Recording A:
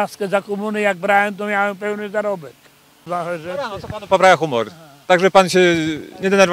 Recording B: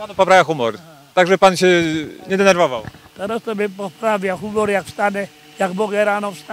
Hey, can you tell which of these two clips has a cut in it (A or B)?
A